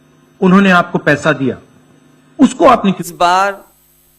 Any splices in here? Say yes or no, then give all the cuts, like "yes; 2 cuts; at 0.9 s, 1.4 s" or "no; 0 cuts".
yes; 1 cut; at 2.9 s